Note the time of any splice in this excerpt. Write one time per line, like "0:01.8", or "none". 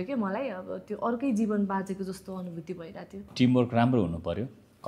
0:03.2